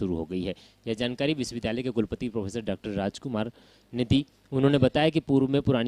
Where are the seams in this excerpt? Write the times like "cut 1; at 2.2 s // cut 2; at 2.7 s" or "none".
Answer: cut 1; at 1.5 s // cut 2; at 3.4 s